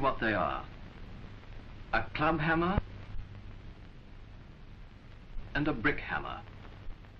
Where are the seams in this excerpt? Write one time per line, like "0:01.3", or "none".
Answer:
0:02.1